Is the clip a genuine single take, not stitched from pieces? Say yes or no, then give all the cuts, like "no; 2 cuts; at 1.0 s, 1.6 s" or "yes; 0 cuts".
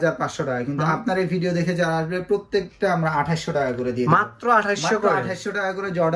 yes; 0 cuts